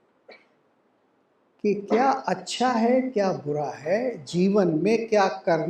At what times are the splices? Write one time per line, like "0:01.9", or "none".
none